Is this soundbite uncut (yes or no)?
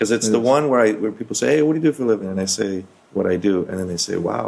yes